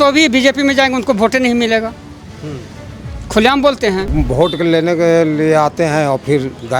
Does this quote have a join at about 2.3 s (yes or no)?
no